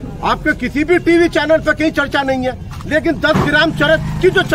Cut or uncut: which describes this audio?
uncut